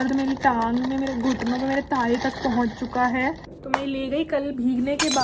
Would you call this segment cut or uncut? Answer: cut